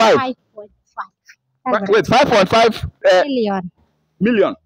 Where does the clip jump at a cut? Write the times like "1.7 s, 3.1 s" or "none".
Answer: none